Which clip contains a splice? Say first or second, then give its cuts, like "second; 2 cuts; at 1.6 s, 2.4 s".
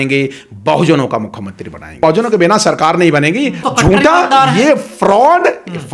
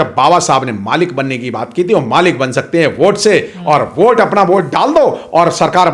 first; 2 cuts; at 2.0 s, 3.7 s